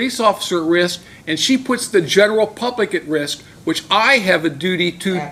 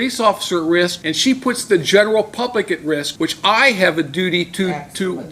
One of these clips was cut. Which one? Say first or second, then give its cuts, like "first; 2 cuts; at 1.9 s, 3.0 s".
second; 2 cuts; at 1.0 s, 3.1 s